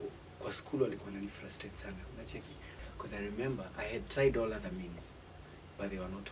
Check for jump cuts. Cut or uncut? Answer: cut